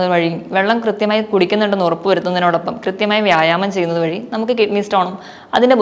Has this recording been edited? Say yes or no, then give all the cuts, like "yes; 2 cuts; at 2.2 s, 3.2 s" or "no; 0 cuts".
no; 0 cuts